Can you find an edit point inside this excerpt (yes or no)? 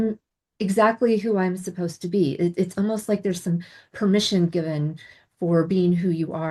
no